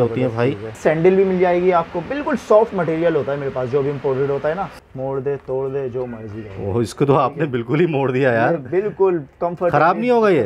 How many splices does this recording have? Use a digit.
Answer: 2